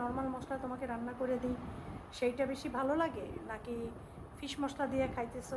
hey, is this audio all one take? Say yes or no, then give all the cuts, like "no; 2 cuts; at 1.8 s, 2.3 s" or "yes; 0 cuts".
yes; 0 cuts